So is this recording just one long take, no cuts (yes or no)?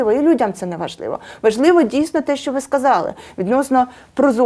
yes